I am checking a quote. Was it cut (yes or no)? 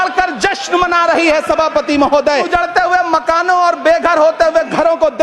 yes